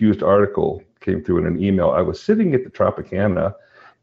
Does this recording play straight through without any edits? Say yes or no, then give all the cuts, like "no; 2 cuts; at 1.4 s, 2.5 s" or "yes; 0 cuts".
yes; 0 cuts